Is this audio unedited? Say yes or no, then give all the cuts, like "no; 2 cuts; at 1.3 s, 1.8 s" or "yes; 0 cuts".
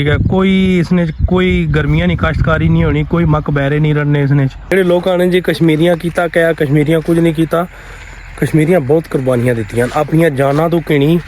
no; 1 cut; at 4.7 s